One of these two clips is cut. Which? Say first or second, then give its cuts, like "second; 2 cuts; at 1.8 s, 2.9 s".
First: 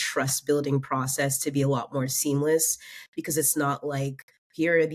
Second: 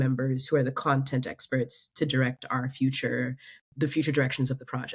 second; 1 cut; at 3.5 s